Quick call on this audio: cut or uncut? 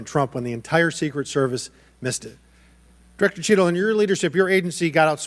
uncut